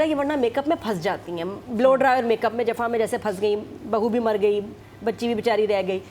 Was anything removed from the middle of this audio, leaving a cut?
no; 0 cuts

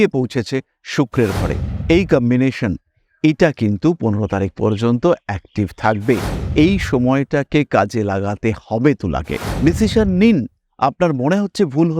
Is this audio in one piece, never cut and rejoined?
no; 1 cut; at 9.4 s

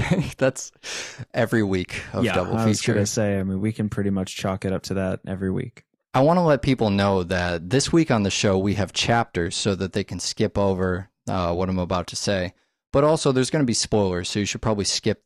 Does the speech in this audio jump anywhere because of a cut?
yes; 1 cut; at 1.5 s

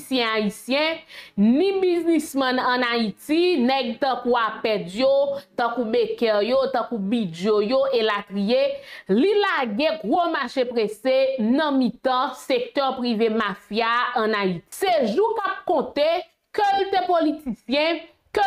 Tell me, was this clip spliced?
yes; 1 cut; at 14.7 s

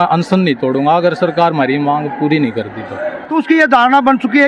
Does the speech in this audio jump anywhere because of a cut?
yes; 1 cut; at 3.2 s

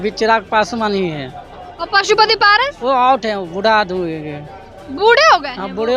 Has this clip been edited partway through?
no; 0 cuts

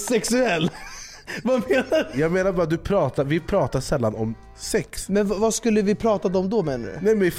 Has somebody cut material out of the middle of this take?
yes; 2 cuts; at 2.1 s, 5.0 s

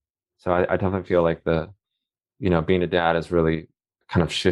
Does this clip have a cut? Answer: no; 0 cuts

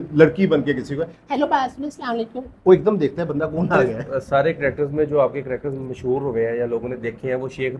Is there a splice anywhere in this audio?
yes; 1 cut; at 4.0 s

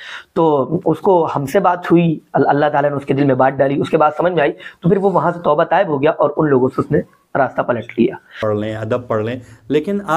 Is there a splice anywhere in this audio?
yes; 1 cut; at 8.4 s

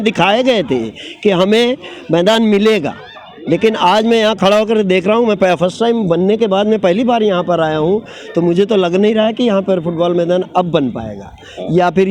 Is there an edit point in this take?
no; 0 cuts

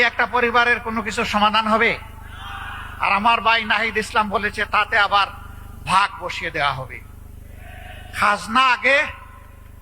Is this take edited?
no; 0 cuts

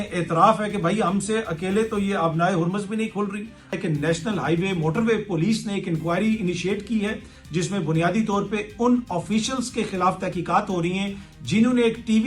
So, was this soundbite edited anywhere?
yes; 1 cut; at 3.8 s

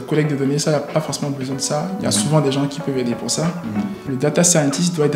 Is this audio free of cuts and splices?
no; 1 cut; at 4.1 s

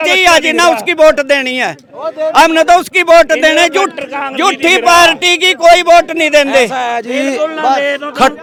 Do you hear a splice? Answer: no; 0 cuts

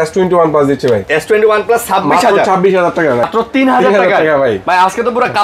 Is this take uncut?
no; 1 cut; at 3.3 s

